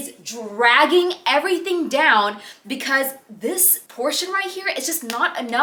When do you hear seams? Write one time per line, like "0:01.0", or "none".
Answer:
none